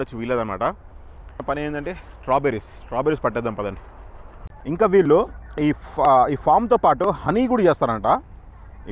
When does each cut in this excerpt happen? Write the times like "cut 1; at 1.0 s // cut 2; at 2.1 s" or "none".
cut 1; at 1.4 s

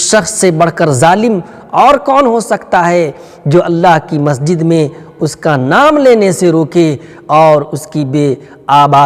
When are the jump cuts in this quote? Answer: none

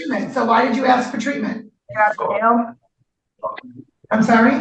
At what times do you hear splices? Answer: cut 1; at 1.8 s

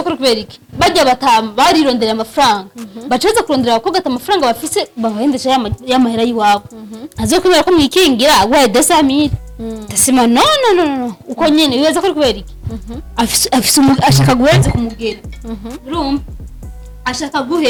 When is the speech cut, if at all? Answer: none

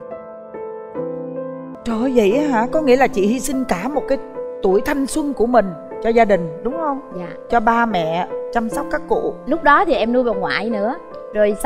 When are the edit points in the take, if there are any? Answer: cut 1; at 1.7 s

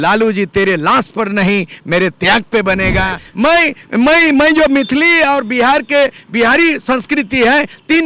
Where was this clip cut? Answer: cut 1; at 3.2 s

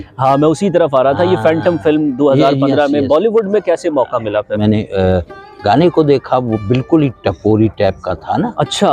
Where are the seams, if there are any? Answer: cut 1; at 4.6 s

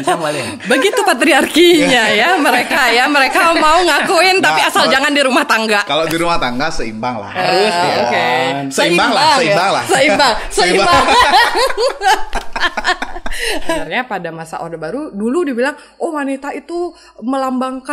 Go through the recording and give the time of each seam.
cut 1; at 13.8 s

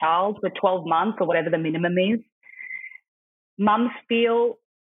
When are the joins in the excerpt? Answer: none

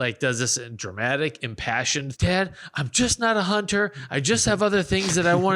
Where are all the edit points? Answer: cut 1; at 2.1 s

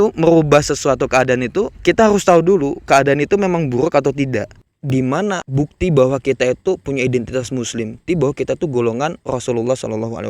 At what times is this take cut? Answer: cut 1; at 1.7 s // cut 2; at 4.6 s // cut 3; at 5.5 s // cut 4; at 8.0 s

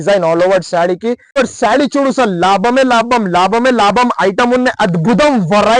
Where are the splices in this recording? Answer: cut 1; at 1.4 s

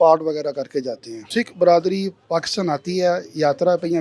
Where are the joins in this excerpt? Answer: cut 1; at 1.4 s

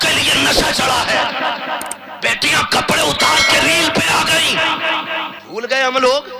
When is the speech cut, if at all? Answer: cut 1; at 1.9 s // cut 2; at 5.3 s

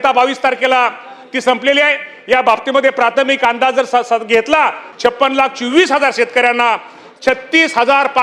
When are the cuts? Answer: cut 1; at 4.8 s

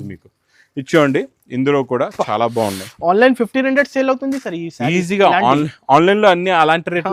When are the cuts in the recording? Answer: none

